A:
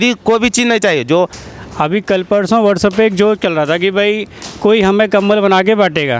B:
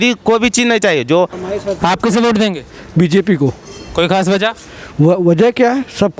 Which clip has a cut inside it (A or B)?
A